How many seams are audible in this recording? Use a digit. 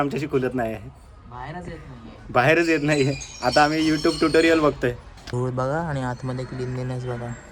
1